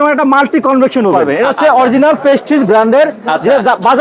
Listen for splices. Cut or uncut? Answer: cut